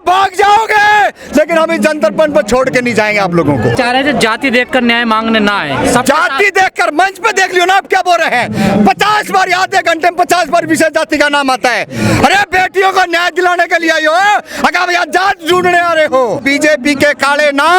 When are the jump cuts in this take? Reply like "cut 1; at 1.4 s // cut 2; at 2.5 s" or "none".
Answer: cut 1; at 3.7 s // cut 2; at 16.4 s